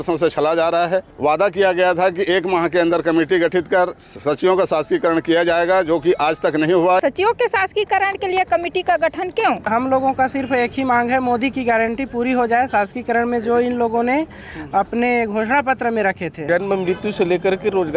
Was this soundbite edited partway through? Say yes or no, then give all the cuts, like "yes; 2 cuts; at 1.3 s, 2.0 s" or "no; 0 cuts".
yes; 4 cuts; at 1.1 s, 7.0 s, 9.6 s, 16.4 s